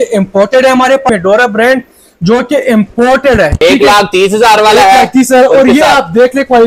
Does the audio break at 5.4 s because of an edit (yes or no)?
no